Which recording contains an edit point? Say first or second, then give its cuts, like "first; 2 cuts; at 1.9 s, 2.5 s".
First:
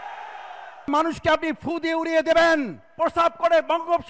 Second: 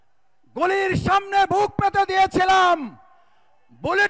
first; 2 cuts; at 0.9 s, 2.9 s